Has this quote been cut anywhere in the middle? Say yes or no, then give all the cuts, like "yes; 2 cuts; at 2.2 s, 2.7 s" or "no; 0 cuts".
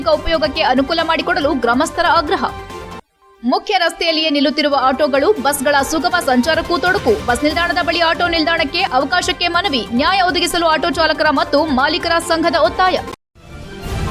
yes; 1 cut; at 13.2 s